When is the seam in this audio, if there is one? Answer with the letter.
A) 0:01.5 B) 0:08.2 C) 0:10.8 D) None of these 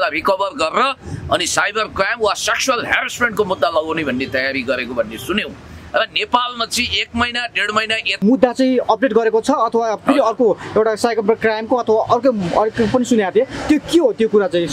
B